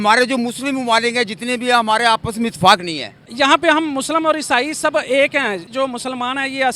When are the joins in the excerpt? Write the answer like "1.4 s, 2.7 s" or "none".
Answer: 3.3 s, 5.7 s

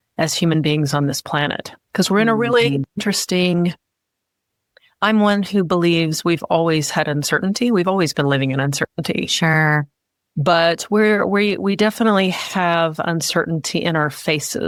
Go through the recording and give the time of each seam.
none

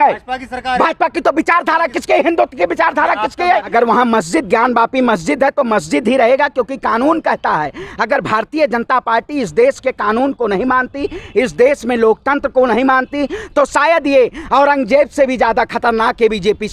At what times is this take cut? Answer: 3.7 s

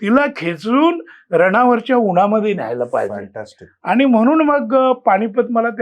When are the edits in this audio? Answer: none

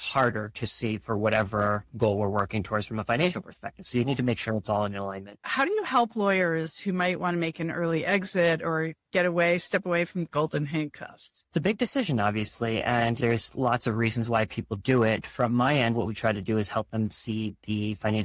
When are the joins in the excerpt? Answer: 5.3 s

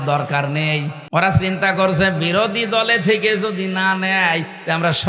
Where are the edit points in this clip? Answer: 0.9 s

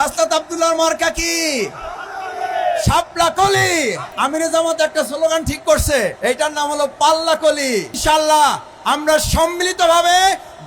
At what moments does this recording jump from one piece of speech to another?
4.1 s, 6.2 s, 8.0 s

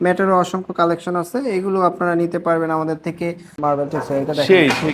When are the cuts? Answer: 3.5 s

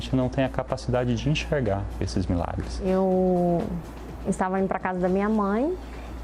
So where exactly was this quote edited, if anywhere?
2.9 s

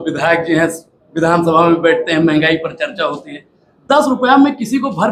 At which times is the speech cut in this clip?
none

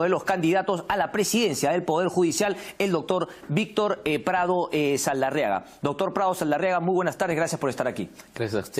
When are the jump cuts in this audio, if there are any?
2.3 s

